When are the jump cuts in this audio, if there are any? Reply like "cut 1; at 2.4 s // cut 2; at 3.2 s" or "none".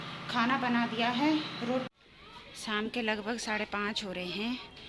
cut 1; at 1.9 s